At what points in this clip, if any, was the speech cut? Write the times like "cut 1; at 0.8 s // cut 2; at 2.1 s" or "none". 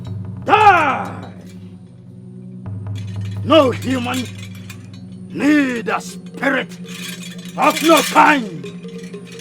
cut 1; at 3.3 s

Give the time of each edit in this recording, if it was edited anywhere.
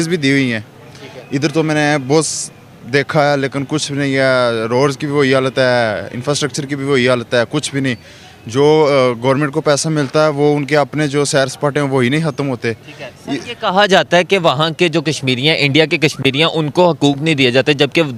none

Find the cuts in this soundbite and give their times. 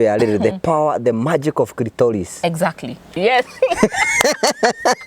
cut 1; at 3.1 s

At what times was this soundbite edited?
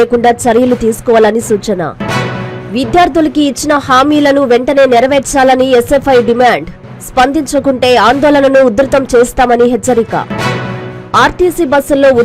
none

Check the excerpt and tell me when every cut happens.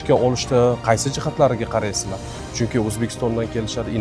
none

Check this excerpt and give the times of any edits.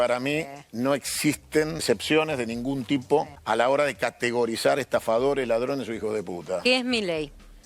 cut 1; at 1.8 s // cut 2; at 3.4 s

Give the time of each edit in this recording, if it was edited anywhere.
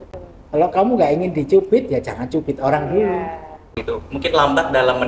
cut 1; at 3.7 s

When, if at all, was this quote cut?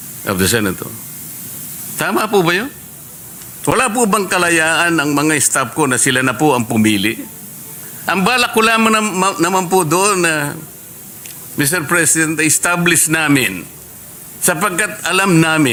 none

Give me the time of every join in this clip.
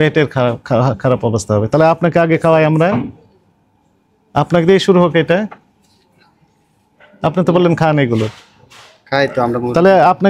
none

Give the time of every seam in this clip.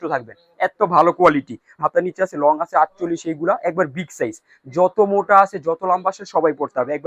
cut 1; at 1.8 s

